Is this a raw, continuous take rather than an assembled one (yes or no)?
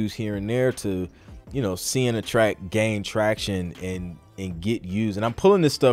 yes